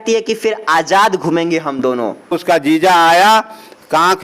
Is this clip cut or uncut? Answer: cut